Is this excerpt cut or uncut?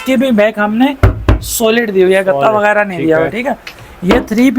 uncut